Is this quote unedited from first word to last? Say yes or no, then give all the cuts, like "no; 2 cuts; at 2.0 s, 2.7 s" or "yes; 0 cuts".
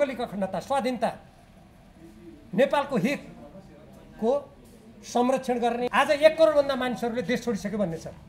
no; 1 cut; at 5.9 s